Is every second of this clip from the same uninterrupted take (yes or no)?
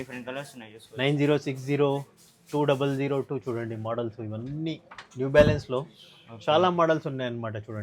yes